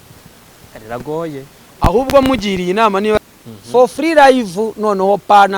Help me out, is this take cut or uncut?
cut